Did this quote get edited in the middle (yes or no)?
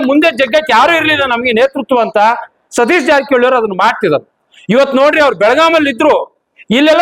no